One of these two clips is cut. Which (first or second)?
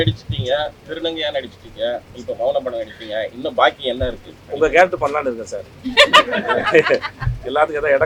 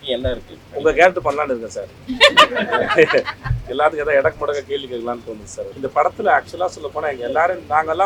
second